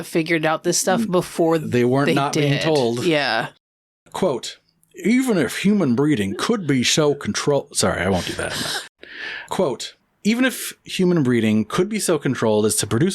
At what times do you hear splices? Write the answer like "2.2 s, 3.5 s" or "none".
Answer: 4.1 s, 8.9 s

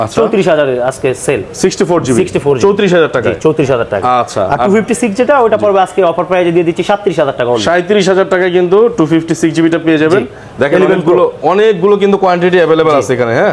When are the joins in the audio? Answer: none

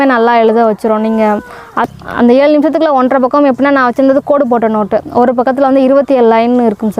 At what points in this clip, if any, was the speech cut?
1.8 s

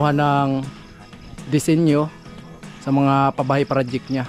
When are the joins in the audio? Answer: none

